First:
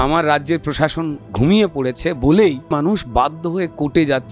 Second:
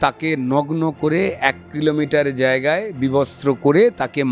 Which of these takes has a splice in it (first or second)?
first